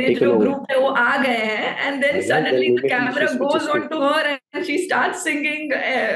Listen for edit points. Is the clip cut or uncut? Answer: uncut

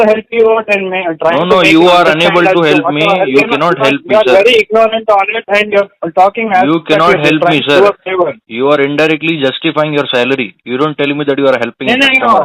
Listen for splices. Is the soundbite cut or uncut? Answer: uncut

